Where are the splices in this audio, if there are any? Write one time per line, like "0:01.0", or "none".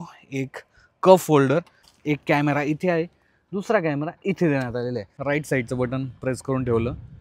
0:01.9
0:05.1